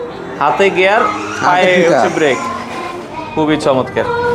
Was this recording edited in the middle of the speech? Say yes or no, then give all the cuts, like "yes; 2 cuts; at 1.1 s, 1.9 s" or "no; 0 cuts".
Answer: no; 0 cuts